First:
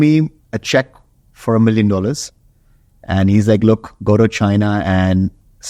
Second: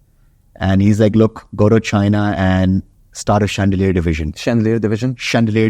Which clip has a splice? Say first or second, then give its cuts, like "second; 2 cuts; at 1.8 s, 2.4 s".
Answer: second; 1 cut; at 4.3 s